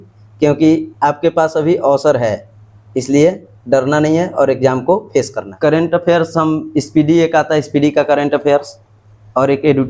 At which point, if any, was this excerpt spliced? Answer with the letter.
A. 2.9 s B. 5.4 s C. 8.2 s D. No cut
B